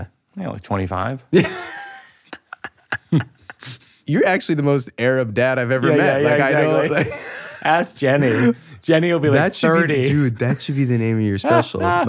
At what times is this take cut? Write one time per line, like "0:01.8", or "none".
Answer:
0:04.0